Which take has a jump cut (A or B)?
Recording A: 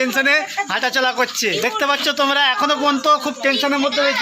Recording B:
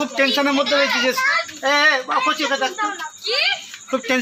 A